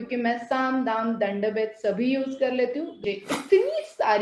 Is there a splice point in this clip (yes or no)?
yes